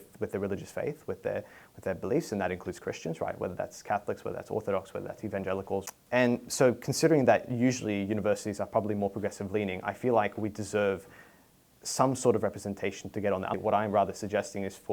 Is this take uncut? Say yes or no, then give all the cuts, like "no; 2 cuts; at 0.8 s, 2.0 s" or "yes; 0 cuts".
no; 2 cuts; at 5.9 s, 13.5 s